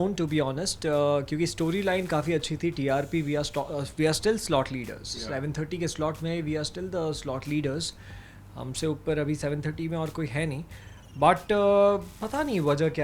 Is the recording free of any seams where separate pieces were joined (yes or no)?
yes